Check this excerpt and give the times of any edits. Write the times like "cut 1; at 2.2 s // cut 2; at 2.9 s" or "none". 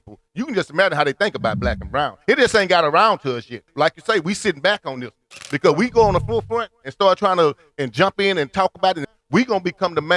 cut 1; at 3.6 s // cut 2; at 9.1 s